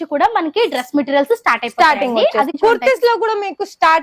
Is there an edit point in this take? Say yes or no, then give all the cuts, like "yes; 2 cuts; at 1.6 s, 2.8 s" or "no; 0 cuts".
yes; 1 cut; at 2.5 s